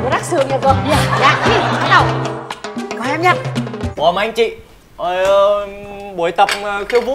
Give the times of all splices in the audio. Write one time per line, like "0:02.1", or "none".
0:03.9